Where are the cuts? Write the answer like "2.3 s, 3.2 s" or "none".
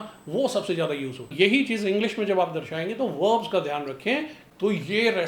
1.3 s, 4.4 s